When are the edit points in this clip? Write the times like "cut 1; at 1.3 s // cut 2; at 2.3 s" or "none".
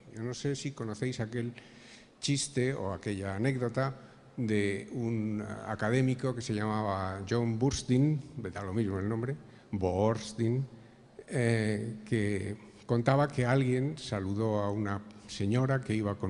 none